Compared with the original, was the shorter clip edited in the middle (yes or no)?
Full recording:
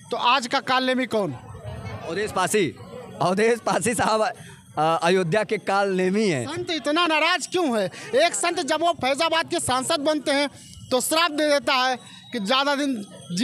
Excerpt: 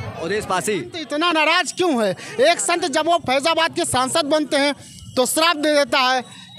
yes